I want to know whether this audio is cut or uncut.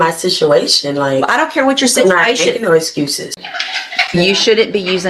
cut